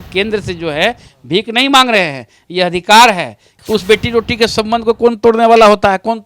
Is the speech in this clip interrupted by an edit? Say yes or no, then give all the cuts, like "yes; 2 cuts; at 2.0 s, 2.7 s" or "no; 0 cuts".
yes; 1 cut; at 3.5 s